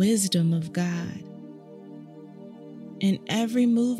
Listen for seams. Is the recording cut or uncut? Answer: cut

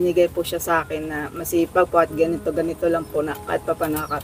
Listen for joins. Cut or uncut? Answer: uncut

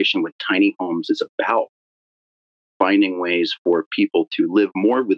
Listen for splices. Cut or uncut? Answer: uncut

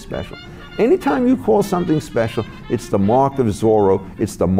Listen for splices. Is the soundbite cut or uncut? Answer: uncut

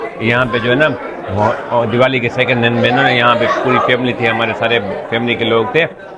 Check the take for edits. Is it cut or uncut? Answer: uncut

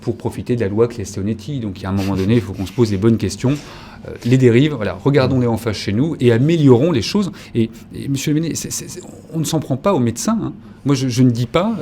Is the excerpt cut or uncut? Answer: uncut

